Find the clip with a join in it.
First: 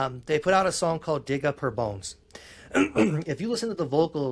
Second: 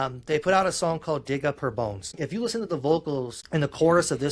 second; 2 cuts; at 2.2 s, 3.4 s

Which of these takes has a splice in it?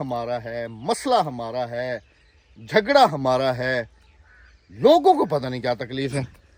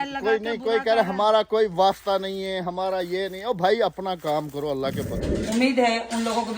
second; 1 cut; at 5.2 s

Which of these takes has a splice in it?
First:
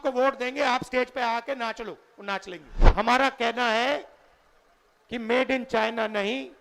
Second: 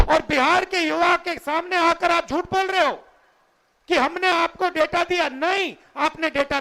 first; 1 cut; at 2.7 s

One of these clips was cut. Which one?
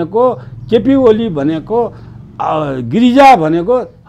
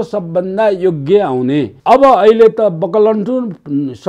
second; 1 cut; at 1.7 s

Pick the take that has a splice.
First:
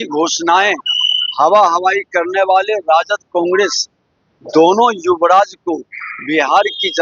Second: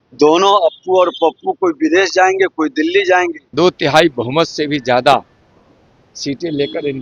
second; 1 cut; at 3.4 s

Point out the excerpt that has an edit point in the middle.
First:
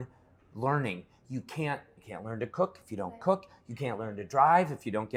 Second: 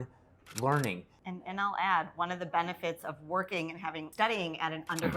second; 2 cuts; at 1.1 s, 4.1 s

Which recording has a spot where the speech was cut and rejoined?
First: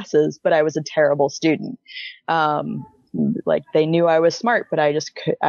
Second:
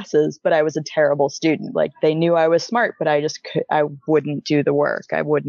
second; 1 cut; at 1.7 s

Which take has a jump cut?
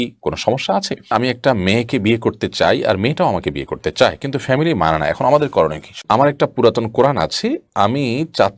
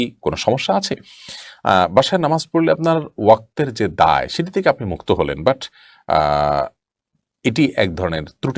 first; 2 cuts; at 1.1 s, 6.0 s

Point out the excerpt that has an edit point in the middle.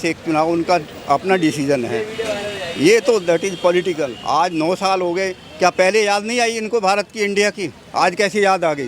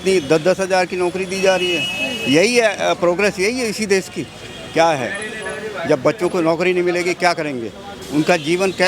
first; 1 cut; at 4.2 s

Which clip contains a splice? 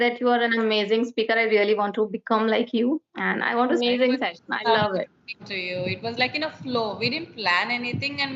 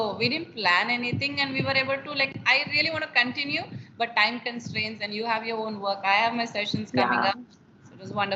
first; 1 cut; at 3.8 s

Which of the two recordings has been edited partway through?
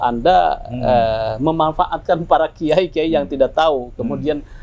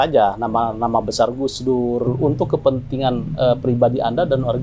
second; 1 cut; at 2.1 s

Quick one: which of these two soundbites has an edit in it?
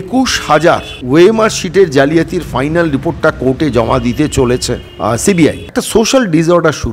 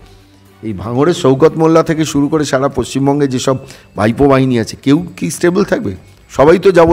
first; 3 cuts; at 0.9 s, 4.9 s, 5.6 s

